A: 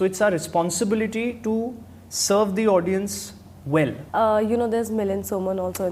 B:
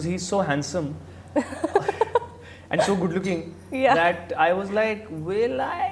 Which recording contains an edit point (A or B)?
A